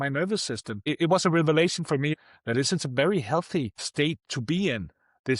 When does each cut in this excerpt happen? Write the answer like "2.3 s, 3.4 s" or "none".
0.8 s, 2.1 s, 3.8 s